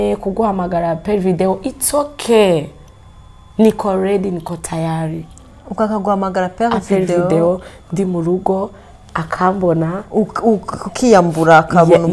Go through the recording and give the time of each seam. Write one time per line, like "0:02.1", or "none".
none